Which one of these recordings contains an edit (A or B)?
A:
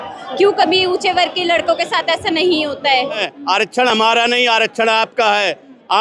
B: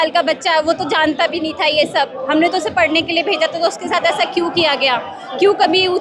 A